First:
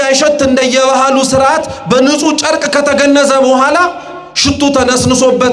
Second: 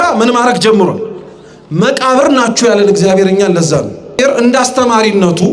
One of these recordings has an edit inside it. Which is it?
second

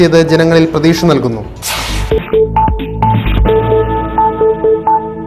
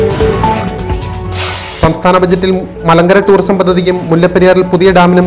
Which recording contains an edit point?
second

